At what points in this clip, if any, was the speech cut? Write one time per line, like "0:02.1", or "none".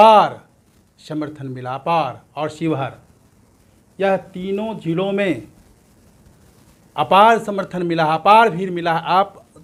none